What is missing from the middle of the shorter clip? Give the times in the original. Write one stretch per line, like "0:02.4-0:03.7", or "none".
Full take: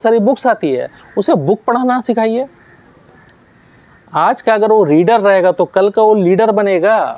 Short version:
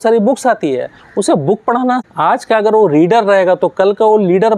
0:02.0-0:04.0